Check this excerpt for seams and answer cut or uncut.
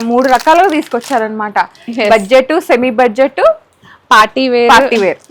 uncut